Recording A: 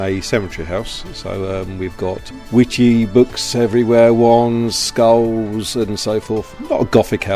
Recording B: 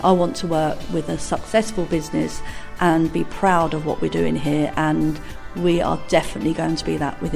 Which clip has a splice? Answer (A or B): A